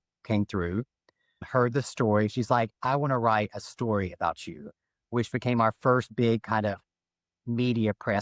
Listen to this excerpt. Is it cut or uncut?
uncut